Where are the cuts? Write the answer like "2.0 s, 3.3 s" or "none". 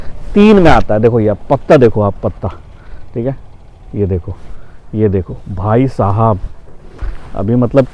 none